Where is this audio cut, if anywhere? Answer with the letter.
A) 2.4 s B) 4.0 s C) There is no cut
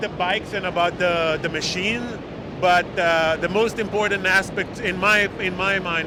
C